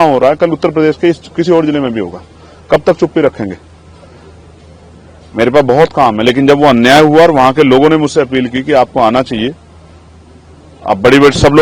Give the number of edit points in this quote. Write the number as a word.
zero